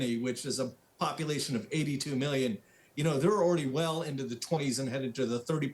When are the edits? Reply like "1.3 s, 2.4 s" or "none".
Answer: none

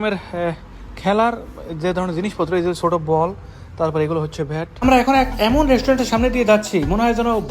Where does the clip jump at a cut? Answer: 4.8 s

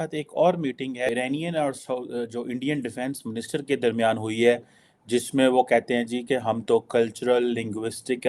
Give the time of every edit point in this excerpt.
1.1 s

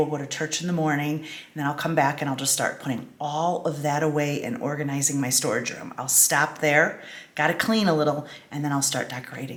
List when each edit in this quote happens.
none

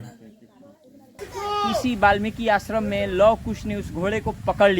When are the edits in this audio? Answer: 1.2 s

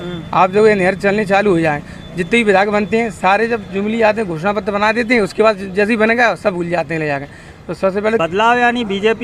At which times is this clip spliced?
8.2 s

